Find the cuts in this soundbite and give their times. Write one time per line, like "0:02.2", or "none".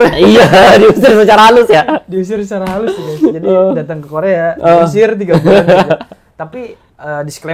none